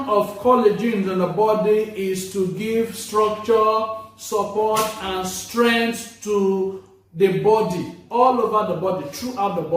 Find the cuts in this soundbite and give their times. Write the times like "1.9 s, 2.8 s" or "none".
none

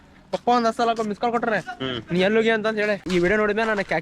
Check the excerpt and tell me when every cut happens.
3.0 s

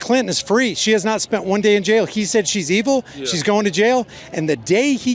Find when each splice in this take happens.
none

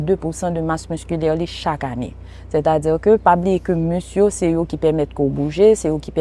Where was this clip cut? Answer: none

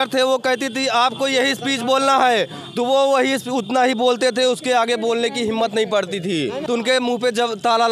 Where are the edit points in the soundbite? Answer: 6.6 s

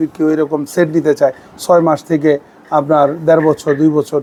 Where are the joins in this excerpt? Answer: none

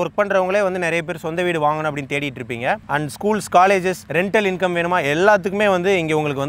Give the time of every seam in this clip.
none

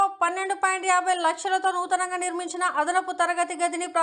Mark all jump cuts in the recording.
none

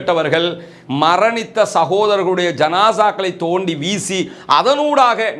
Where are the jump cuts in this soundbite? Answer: none

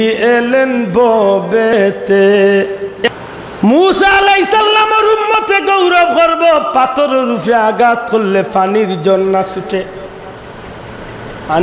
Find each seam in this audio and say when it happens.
3.1 s

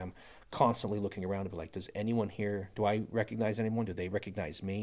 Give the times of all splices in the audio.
none

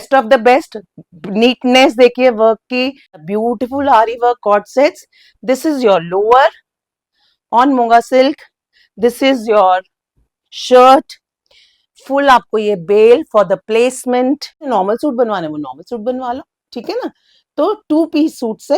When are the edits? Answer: 3.2 s, 14.7 s

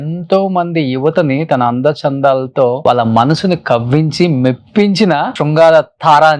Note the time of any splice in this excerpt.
2.8 s, 5.4 s

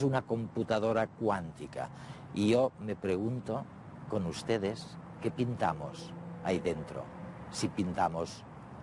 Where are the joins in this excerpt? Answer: 4.3 s

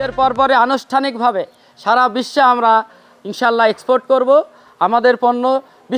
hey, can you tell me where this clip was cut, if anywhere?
none

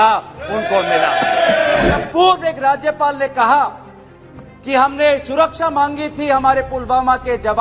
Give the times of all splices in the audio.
2.0 s

